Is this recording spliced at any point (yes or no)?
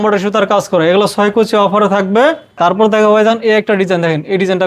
yes